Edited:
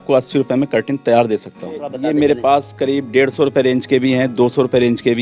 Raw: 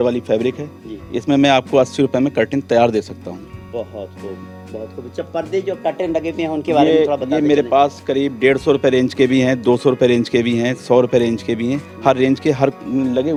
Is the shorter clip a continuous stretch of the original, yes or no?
no